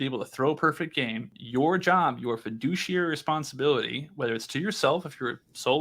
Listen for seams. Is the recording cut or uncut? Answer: cut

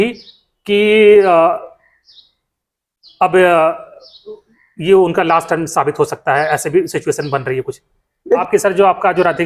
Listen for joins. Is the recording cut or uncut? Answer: cut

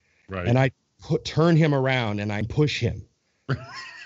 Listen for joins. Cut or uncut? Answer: cut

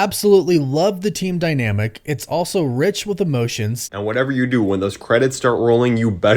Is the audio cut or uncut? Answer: cut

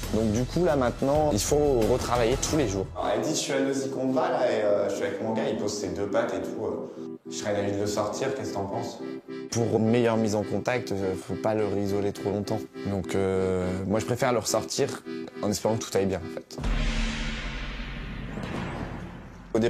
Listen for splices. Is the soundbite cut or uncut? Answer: uncut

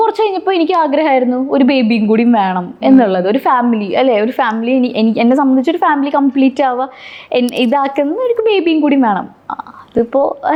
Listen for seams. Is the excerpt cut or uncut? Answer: uncut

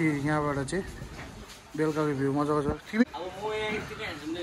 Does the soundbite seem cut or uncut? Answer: cut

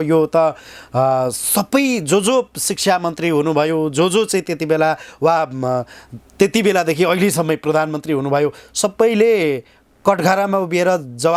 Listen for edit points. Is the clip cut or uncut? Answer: uncut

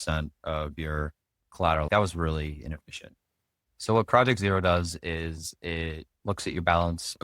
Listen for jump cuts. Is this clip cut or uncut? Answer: cut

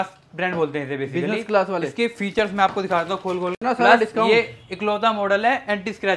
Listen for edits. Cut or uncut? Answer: cut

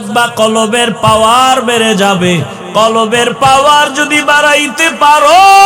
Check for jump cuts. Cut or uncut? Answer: uncut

